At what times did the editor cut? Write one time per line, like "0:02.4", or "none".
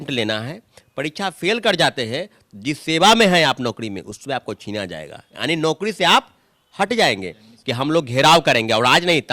0:07.5